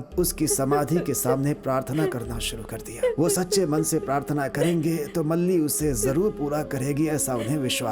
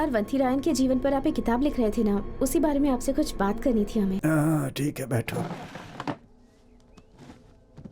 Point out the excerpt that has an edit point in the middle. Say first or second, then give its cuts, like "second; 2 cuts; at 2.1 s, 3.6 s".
second; 1 cut; at 4.2 s